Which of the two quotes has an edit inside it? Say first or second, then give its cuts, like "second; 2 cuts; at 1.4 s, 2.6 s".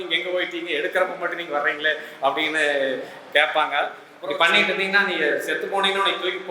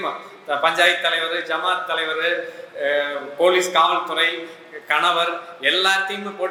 first; 1 cut; at 4.1 s